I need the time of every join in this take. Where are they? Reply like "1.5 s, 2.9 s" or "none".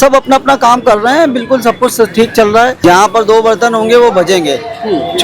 2.8 s